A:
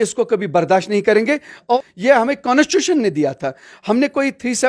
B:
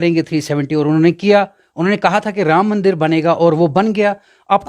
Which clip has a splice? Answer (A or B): A